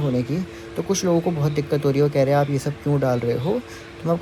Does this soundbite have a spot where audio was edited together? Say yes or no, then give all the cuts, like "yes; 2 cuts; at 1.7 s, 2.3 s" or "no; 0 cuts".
no; 0 cuts